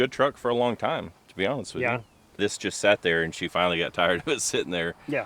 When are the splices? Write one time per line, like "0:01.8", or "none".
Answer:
0:02.4